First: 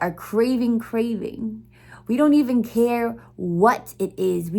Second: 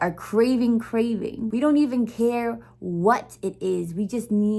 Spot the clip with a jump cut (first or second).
second